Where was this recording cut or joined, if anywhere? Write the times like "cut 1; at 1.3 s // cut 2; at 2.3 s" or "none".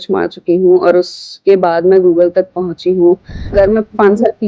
cut 1; at 3.5 s